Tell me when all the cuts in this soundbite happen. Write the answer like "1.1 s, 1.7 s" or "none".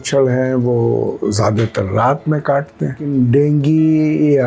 3.0 s